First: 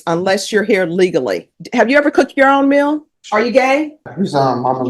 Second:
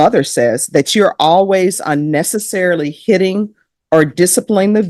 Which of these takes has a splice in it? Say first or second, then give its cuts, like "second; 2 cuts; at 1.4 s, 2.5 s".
first; 3 cuts; at 1.6 s, 3.1 s, 4.1 s